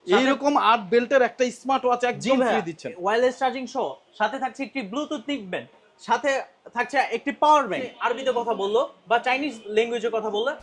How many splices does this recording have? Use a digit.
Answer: 1